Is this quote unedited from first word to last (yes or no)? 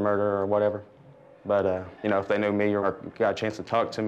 no